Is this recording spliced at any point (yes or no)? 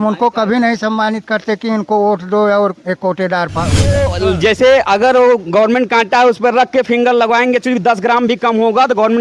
yes